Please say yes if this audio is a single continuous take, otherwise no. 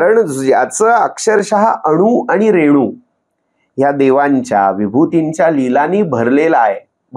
yes